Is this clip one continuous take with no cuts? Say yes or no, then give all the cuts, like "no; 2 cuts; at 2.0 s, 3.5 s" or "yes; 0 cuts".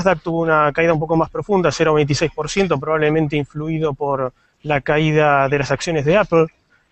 no; 1 cut; at 3.9 s